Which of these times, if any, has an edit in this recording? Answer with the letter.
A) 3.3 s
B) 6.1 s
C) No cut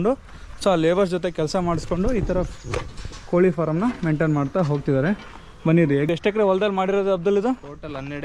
B